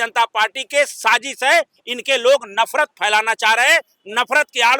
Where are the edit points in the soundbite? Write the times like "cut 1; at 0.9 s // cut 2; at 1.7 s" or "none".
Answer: none